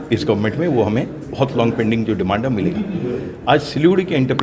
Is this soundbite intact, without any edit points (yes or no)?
yes